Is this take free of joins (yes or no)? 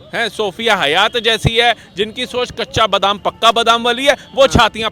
yes